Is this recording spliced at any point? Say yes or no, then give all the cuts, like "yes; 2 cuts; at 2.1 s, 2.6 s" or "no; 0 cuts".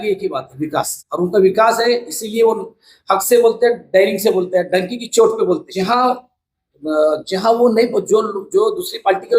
yes; 2 cuts; at 1.0 s, 5.7 s